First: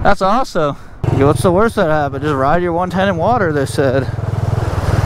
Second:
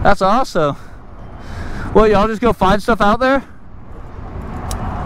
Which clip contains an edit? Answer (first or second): first